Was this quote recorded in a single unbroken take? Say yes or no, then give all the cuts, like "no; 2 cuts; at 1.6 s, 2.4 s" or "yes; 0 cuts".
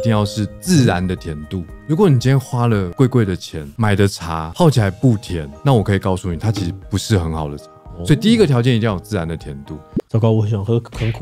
yes; 0 cuts